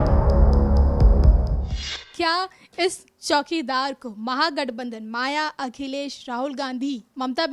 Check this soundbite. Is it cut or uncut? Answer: uncut